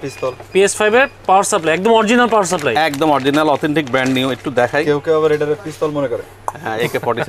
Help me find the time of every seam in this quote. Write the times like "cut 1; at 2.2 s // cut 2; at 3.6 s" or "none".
none

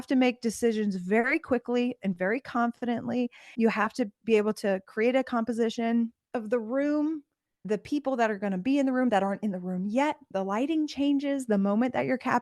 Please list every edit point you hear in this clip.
cut 1; at 3.5 s // cut 2; at 10.2 s

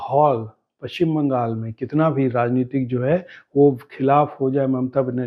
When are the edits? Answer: none

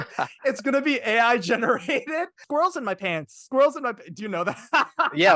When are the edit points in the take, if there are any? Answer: cut 1; at 2.4 s

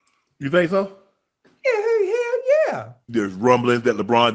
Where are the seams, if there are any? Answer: cut 1; at 3.0 s

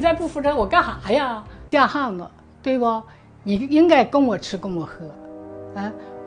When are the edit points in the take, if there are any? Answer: cut 1; at 1.6 s

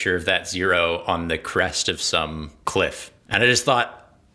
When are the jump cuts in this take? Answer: cut 1; at 2.5 s // cut 2; at 3.1 s

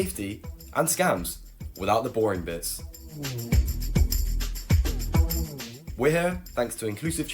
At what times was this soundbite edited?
cut 1; at 5.8 s

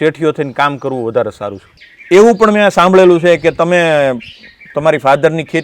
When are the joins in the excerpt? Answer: cut 1; at 1.8 s

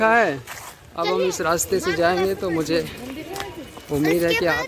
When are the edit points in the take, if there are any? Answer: none

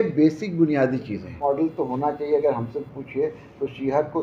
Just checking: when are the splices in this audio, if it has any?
cut 1; at 1.2 s

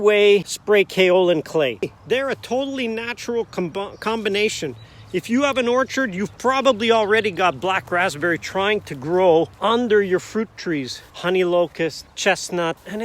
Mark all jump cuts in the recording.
cut 1; at 1.8 s // cut 2; at 11.1 s

